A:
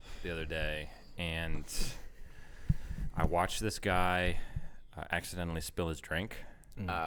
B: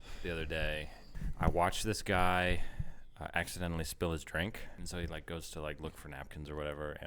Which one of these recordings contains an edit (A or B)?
B